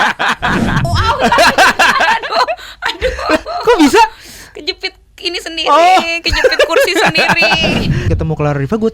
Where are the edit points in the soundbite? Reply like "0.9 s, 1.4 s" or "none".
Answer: 0.9 s, 8.1 s